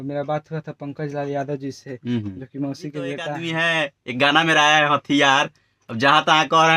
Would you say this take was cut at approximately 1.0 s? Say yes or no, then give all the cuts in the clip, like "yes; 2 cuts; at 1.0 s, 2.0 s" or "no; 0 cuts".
no; 1 cut; at 3.4 s